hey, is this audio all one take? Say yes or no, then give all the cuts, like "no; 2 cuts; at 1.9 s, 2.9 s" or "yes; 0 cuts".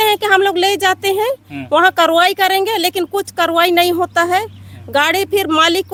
yes; 0 cuts